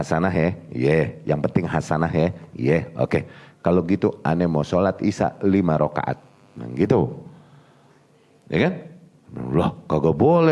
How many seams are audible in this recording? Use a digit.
0